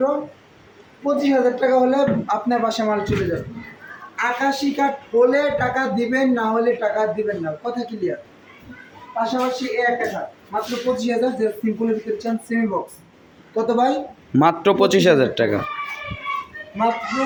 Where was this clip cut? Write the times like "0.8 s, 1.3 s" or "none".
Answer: none